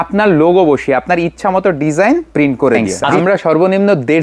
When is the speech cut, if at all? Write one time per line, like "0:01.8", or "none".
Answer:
0:03.1